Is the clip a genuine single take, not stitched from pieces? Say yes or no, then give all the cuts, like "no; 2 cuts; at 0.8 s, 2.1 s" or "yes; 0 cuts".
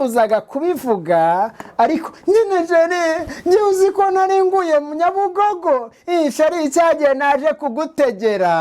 yes; 0 cuts